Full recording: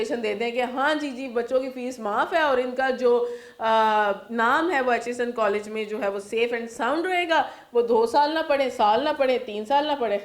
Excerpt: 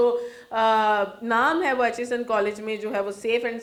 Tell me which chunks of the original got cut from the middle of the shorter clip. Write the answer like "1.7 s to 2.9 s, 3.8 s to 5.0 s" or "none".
none